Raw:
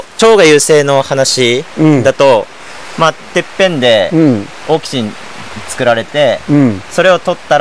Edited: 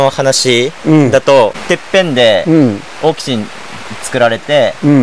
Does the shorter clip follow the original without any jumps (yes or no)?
no